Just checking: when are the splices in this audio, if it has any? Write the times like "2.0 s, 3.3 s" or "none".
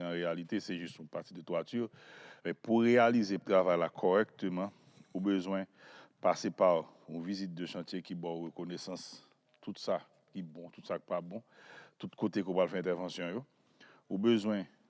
3.4 s